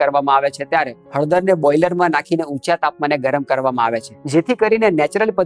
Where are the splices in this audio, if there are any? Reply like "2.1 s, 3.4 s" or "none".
1.0 s, 4.1 s